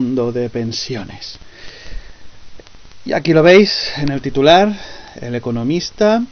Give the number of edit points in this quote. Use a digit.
0